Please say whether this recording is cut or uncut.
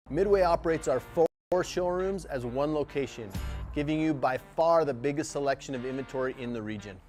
uncut